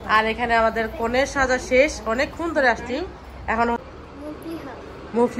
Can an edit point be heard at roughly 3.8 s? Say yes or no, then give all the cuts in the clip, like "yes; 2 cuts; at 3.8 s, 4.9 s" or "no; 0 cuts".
yes; 1 cut; at 3.8 s